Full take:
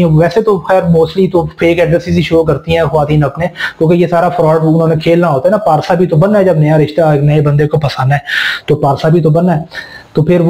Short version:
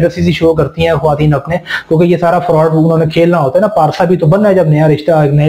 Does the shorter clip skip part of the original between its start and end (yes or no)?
no